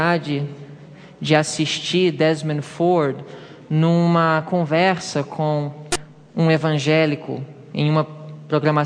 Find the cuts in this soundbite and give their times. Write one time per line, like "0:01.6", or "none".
0:06.7